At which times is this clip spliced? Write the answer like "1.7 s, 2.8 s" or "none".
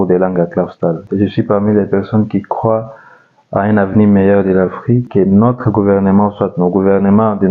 1.1 s, 5.1 s